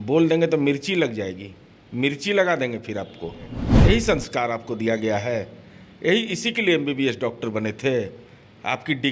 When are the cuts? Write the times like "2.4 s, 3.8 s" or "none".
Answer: 3.7 s